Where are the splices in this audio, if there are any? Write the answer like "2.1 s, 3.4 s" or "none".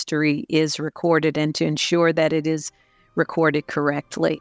none